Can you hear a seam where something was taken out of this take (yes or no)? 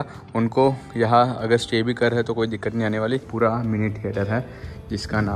yes